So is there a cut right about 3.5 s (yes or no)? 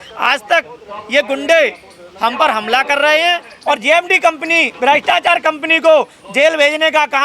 yes